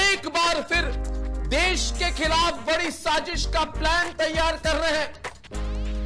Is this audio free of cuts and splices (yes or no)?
yes